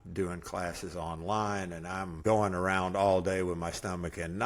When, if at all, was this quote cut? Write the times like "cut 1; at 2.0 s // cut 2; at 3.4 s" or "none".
cut 1; at 2.2 s